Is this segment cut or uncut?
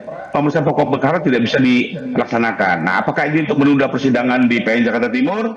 uncut